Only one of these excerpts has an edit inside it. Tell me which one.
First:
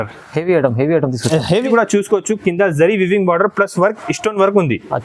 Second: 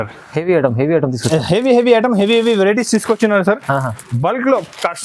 first; 1 cut; at 1.7 s

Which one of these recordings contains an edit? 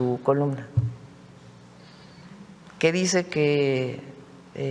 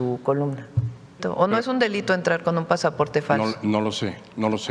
second; 1 cut; at 1.2 s

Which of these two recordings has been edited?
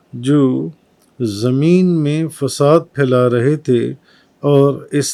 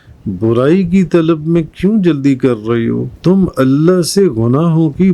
second; 1 cut; at 3.1 s

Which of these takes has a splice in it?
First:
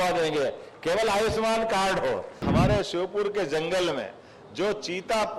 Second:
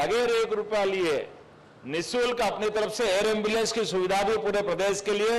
first; 1 cut; at 2.4 s

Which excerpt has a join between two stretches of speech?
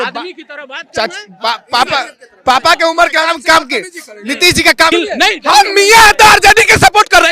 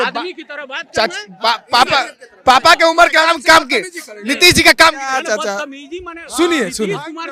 first; 1 cut; at 4.9 s

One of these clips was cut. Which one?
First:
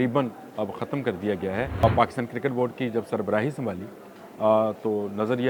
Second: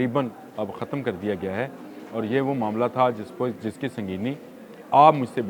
first; 1 cut; at 1.8 s

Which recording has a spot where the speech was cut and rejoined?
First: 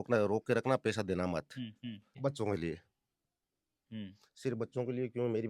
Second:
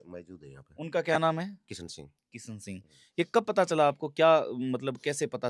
first; 1 cut; at 2.1 s

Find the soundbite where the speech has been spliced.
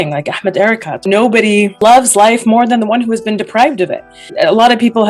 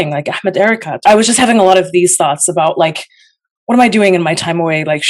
first; 2 cuts; at 1.0 s, 4.1 s

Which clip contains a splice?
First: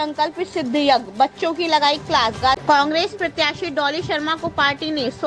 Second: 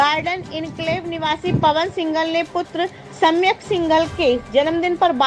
first; 1 cut; at 2.6 s

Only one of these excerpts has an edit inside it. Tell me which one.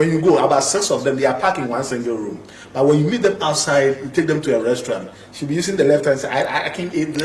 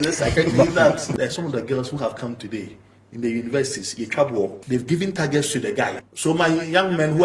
second; 3 cuts; at 1.1 s, 4.6 s, 5.9 s

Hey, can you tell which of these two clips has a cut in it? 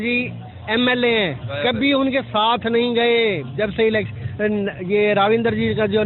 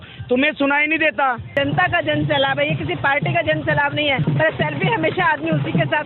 second; 2 cuts; at 1.5 s, 4.2 s

